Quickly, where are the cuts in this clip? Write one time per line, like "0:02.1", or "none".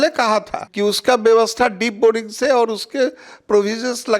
none